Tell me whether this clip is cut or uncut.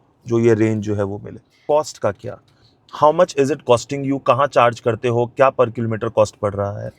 cut